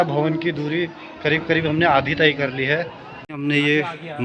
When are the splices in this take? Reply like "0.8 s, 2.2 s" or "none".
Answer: 3.1 s

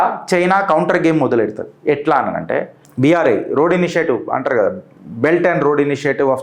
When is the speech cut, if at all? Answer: none

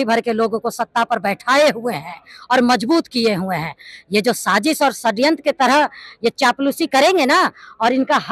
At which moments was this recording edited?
none

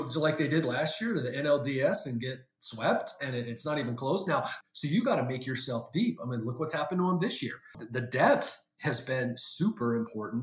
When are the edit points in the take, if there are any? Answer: 4.5 s, 7.8 s

